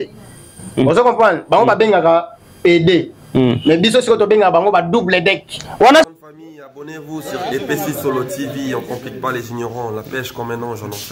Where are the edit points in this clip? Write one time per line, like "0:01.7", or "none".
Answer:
0:06.1